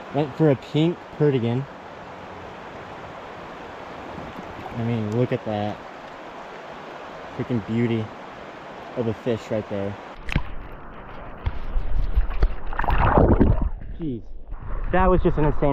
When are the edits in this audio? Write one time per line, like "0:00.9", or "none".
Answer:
0:10.2